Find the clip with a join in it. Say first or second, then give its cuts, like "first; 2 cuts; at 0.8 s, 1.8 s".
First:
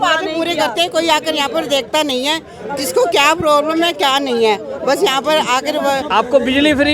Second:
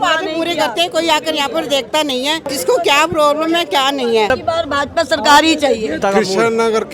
second; 3 cuts; at 2.5 s, 4.3 s, 6.0 s